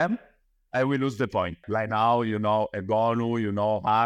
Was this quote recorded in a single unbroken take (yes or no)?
no